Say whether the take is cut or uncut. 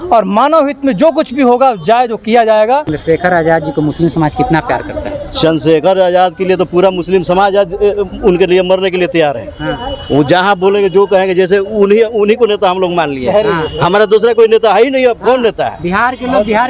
cut